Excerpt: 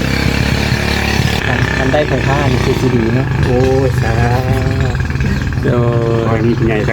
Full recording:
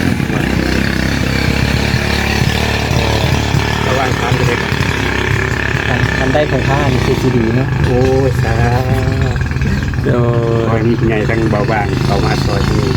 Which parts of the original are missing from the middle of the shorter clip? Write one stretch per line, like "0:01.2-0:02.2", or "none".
0:02.6-0:05.8